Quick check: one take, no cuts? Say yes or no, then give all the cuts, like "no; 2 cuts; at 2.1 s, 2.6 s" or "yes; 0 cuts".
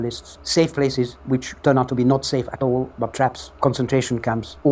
no; 1 cut; at 1.5 s